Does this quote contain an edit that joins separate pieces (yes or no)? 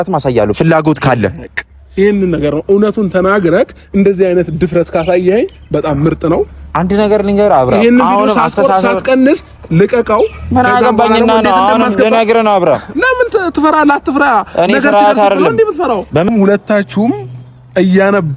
yes